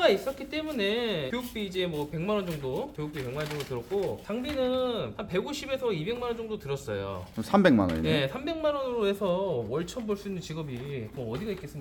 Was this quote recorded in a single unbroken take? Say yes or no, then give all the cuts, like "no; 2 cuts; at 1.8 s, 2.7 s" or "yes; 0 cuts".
yes; 0 cuts